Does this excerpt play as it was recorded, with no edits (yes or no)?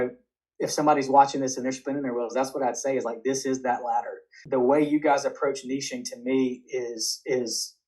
no